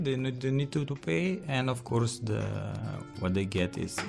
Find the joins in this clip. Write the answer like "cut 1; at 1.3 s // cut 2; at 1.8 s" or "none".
none